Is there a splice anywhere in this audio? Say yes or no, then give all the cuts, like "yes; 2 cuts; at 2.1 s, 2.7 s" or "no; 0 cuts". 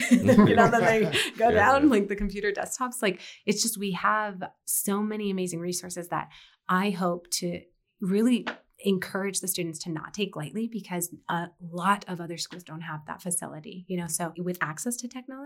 yes; 1 cut; at 14.3 s